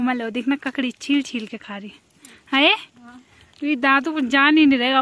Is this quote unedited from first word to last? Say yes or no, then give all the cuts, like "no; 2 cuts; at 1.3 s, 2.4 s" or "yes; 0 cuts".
yes; 0 cuts